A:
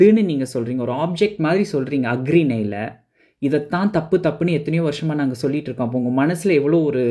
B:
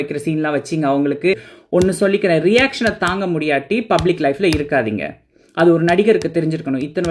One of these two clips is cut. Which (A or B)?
B